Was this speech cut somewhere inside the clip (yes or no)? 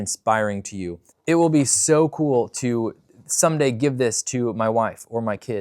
yes